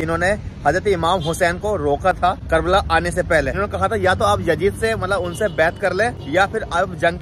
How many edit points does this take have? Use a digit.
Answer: 3